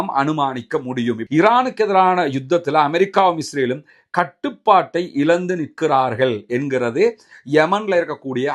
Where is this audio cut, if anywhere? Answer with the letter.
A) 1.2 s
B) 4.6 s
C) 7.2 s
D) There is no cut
A